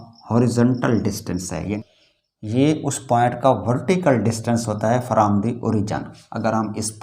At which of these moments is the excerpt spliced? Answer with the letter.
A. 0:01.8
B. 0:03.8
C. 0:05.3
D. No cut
A